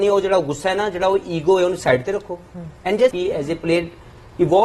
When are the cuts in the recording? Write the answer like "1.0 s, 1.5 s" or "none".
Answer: 3.2 s